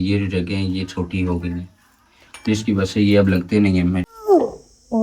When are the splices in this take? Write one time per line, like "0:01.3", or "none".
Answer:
0:04.1